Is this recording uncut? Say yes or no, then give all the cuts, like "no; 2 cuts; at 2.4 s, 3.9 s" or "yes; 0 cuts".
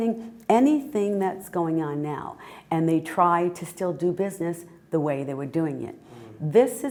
yes; 0 cuts